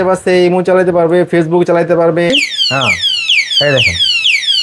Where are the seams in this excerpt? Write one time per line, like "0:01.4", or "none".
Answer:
0:02.3